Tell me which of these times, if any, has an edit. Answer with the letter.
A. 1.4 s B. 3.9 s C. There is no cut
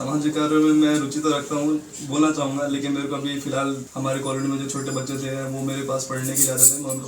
B